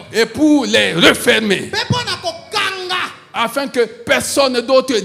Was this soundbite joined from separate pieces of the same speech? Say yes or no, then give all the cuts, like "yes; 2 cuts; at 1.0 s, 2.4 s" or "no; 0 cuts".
no; 0 cuts